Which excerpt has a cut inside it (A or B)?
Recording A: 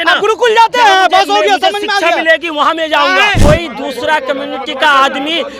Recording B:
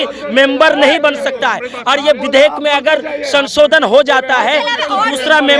A